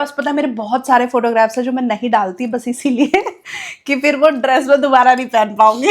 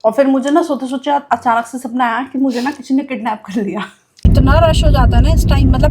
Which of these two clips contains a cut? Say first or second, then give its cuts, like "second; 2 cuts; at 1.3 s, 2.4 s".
second; 1 cut; at 4.2 s